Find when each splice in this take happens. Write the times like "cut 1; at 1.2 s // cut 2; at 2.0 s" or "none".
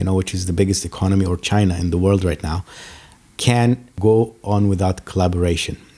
cut 1; at 3.9 s